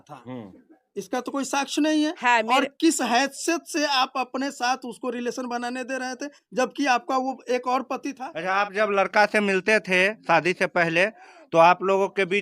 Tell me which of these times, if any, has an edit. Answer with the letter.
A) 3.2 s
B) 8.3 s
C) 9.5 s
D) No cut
B